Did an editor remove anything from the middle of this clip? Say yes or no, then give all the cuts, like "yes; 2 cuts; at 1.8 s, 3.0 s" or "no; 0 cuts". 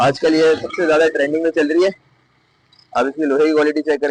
no; 0 cuts